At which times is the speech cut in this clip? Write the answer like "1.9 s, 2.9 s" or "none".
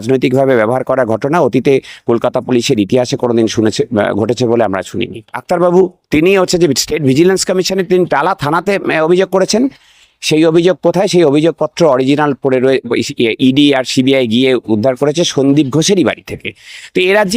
5.3 s